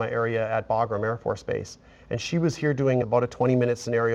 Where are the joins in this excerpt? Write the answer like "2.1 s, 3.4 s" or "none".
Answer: 3.1 s

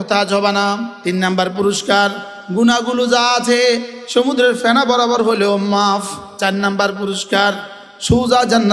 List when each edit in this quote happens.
0.9 s, 6.3 s

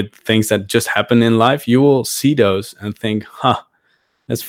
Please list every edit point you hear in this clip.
none

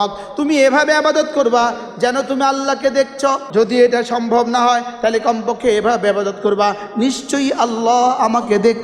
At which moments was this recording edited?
3.4 s

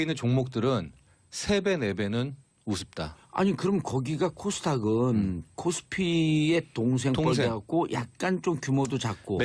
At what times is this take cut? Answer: 5.8 s

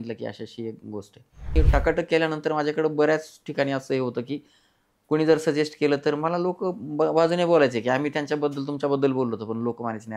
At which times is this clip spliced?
1.5 s

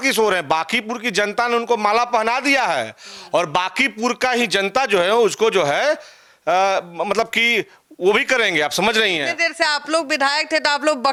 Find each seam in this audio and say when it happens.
none

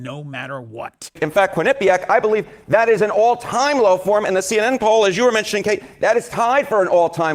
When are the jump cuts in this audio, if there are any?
1.2 s

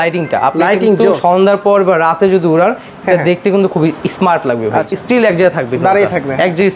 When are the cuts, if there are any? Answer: 4.9 s

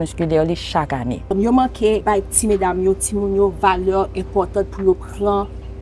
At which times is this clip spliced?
1.3 s, 2.0 s

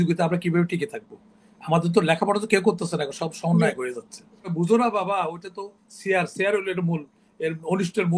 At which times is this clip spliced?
4.5 s

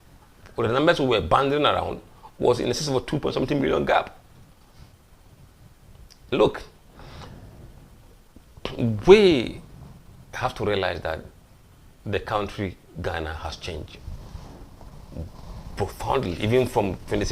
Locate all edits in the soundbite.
none

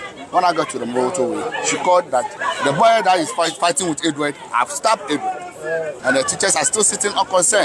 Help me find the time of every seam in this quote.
2.4 s, 5.9 s

